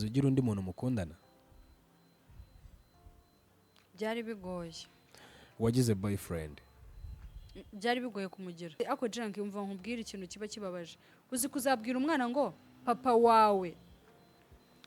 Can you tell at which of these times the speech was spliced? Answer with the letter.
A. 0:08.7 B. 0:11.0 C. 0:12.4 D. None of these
A